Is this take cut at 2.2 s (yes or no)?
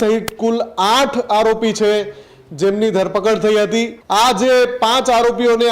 no